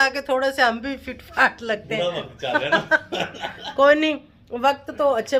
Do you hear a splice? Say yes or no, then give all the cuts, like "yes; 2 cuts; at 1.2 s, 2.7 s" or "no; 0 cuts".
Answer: no; 0 cuts